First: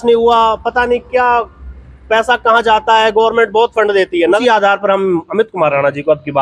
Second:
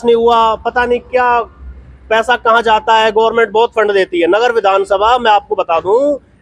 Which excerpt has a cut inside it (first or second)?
first